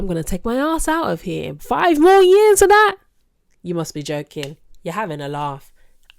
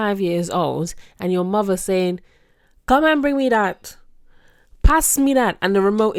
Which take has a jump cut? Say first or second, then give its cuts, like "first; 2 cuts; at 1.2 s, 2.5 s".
first; 1 cut; at 1.5 s